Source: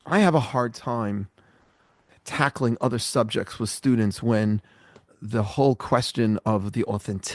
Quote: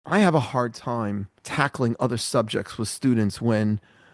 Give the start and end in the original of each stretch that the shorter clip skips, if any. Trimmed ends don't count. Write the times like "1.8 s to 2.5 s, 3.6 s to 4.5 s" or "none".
1.4 s to 2.2 s